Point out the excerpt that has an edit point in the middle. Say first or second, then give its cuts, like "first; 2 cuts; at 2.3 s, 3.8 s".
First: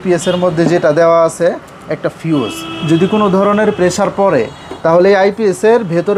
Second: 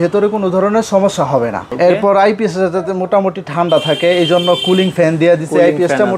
second; 1 cut; at 1.7 s